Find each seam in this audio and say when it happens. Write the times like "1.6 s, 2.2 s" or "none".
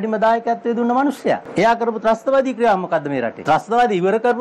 1.5 s, 3.4 s